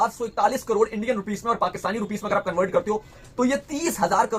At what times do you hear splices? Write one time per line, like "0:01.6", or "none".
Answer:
none